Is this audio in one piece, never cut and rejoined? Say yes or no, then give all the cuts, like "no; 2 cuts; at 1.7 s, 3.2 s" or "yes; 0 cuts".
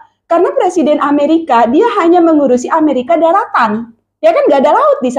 yes; 0 cuts